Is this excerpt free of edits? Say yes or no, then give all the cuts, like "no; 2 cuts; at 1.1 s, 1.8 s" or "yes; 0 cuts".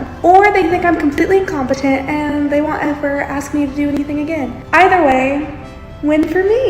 no; 1 cut; at 4.6 s